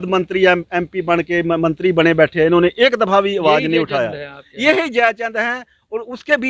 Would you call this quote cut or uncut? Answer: uncut